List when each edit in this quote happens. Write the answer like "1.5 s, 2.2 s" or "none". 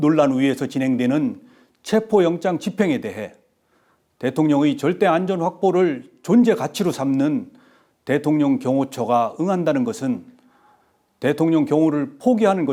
none